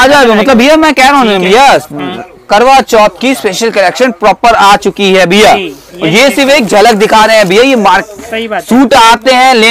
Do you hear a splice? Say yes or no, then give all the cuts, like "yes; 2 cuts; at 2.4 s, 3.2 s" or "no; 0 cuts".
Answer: no; 0 cuts